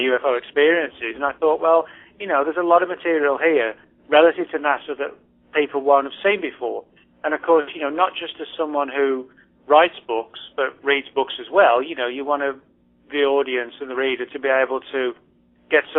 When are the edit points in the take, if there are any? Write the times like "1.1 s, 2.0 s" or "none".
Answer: 1.7 s